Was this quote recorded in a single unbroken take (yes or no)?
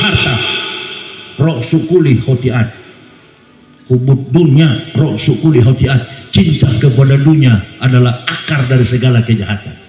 yes